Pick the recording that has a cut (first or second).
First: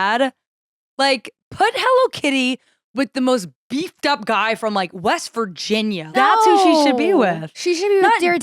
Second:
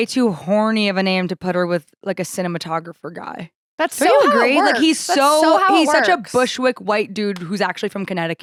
first